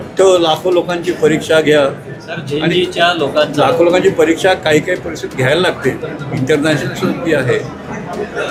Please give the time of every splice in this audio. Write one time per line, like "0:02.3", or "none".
none